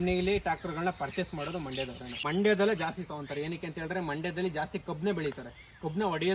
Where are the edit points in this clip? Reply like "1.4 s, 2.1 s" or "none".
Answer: 2.2 s